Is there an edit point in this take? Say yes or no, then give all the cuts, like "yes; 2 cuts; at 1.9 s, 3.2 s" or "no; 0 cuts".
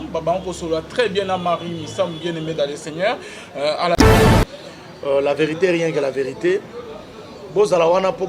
yes; 1 cut; at 4.0 s